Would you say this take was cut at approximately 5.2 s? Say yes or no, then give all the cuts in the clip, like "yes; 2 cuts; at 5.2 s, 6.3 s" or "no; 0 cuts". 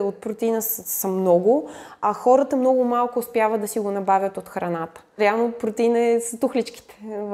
yes; 1 cut; at 5.2 s